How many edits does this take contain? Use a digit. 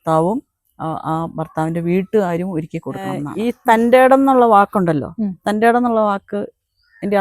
1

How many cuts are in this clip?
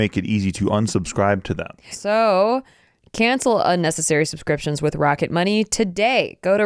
1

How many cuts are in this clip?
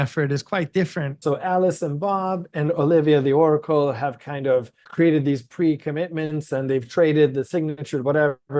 2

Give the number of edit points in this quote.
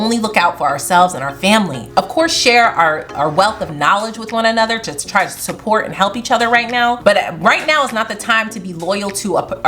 2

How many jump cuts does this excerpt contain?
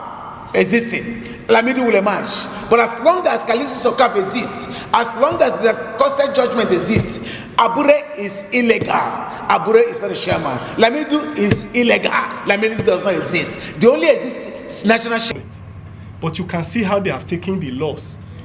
1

